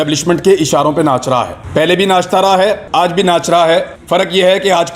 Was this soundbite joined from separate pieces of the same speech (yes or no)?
yes